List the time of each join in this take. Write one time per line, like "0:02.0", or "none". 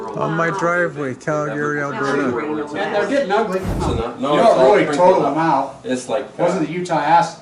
0:01.8